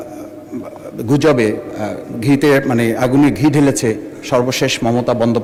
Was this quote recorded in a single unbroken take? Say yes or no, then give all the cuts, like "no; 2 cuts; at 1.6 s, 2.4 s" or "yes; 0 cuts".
yes; 0 cuts